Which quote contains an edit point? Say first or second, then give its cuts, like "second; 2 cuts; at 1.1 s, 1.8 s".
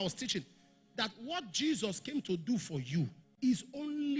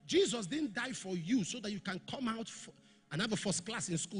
first; 1 cut; at 3.2 s